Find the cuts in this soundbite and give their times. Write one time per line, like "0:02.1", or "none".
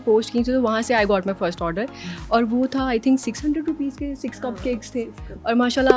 none